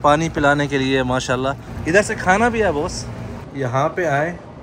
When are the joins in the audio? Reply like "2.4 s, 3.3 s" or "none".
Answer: 1.7 s, 3.5 s

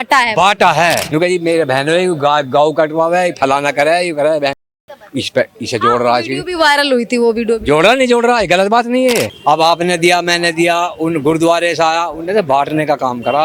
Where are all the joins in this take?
1.0 s, 9.3 s

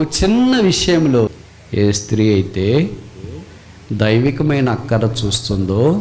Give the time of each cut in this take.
1.3 s

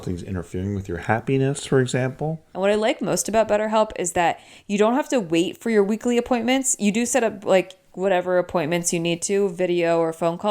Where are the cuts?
2.4 s

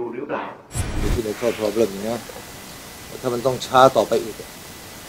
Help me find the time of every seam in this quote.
1.0 s

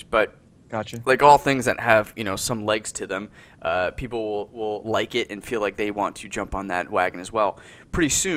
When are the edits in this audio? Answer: none

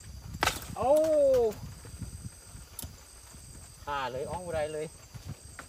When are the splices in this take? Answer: none

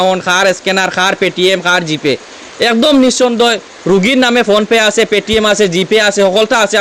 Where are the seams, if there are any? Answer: none

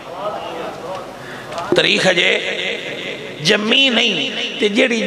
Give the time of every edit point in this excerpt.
none

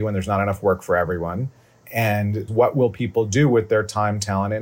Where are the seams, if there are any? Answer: 2.5 s

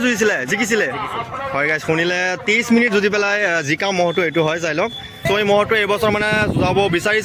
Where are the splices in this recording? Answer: 5.1 s

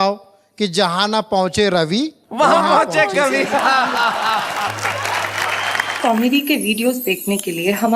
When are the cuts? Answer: 5.9 s

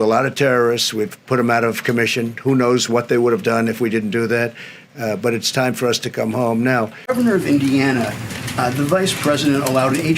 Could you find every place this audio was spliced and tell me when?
7.1 s

